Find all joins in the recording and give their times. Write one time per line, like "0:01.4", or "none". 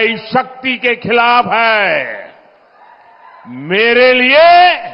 none